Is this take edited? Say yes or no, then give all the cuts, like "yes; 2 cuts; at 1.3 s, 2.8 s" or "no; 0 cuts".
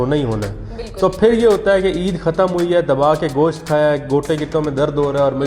no; 0 cuts